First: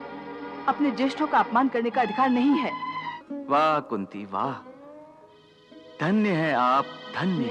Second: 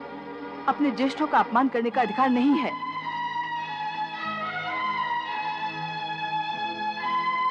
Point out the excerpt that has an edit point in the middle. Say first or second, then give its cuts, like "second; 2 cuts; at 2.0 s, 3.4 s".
first; 1 cut; at 3.1 s